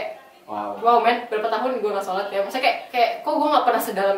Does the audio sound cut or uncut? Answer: cut